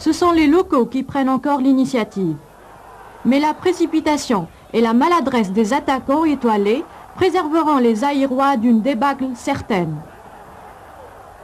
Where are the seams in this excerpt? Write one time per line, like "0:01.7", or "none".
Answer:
0:07.0